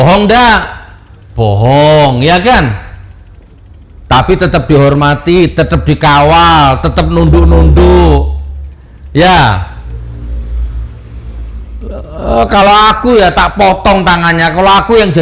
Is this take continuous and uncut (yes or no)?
yes